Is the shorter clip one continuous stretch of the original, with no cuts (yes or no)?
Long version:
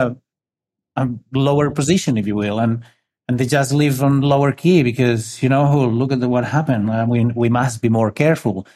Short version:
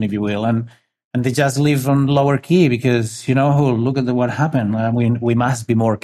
yes